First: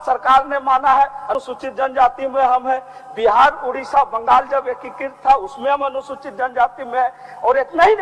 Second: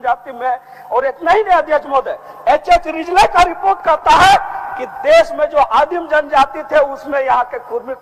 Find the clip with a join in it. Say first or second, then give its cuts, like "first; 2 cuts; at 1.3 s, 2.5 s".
first; 1 cut; at 1.3 s